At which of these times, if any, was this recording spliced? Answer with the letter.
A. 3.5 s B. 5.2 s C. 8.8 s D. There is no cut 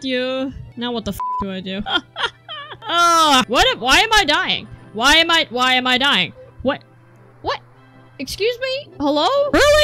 A